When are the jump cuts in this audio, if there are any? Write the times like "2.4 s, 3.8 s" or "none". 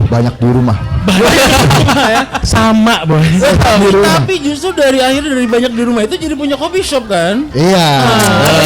none